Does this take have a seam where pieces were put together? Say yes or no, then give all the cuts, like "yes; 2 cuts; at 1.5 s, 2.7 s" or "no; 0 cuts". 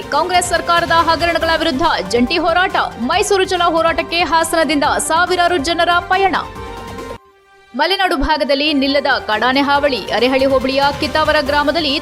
no; 0 cuts